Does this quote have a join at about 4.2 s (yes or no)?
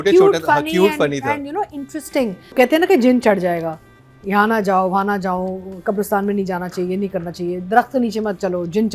no